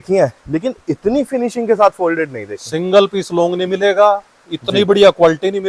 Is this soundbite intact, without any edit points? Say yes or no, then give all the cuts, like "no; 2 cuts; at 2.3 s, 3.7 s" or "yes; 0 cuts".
yes; 0 cuts